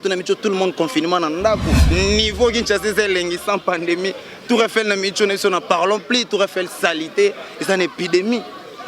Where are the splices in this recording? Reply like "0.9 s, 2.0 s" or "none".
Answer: 1.8 s

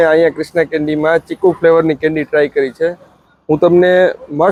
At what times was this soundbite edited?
none

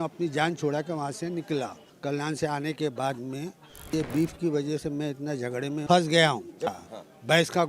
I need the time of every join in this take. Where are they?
1.9 s, 3.9 s, 5.8 s, 6.8 s

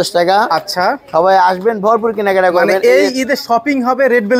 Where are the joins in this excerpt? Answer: none

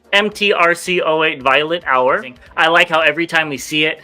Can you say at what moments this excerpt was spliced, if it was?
2.4 s

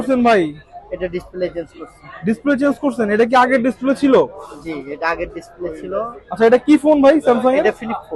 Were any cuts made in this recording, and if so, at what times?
none

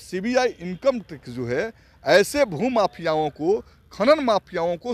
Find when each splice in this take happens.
none

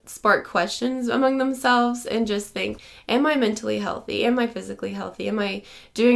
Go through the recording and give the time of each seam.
none

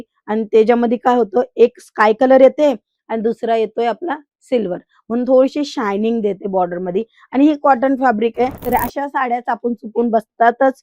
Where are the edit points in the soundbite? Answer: 8.6 s

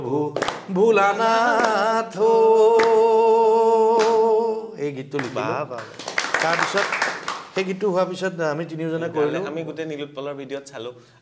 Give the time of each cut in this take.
none

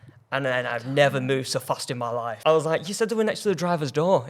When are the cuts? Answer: 2.3 s

